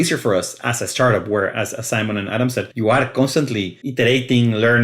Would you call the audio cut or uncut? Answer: cut